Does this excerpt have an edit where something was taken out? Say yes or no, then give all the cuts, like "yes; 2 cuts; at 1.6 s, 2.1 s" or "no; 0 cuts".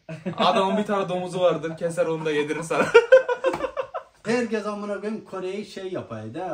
yes; 1 cut; at 4.1 s